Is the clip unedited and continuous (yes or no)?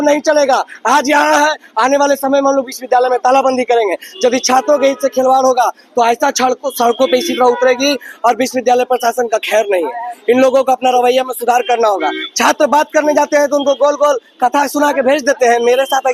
yes